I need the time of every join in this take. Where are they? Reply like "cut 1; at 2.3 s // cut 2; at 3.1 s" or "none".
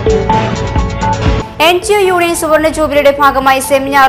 none